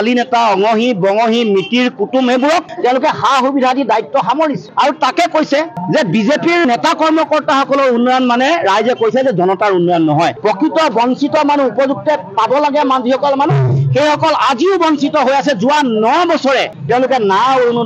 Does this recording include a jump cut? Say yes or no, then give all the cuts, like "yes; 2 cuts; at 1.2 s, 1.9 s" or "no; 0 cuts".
no; 0 cuts